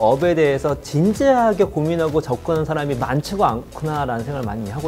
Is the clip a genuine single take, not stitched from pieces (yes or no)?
yes